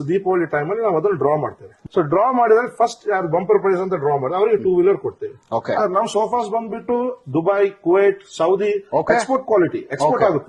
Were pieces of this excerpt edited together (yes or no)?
yes